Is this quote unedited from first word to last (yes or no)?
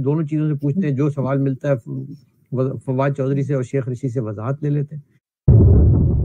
no